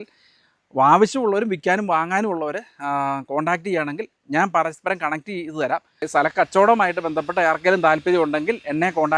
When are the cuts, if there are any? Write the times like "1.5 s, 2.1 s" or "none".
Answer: 6.0 s